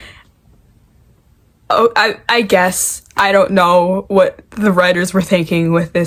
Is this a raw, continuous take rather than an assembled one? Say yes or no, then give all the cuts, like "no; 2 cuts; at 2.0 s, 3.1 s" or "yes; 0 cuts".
yes; 0 cuts